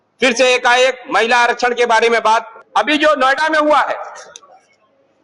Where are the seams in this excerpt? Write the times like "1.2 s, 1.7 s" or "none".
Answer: 2.6 s